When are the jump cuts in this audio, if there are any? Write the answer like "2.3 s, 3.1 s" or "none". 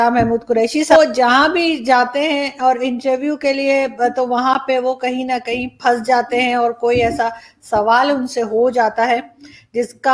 0.9 s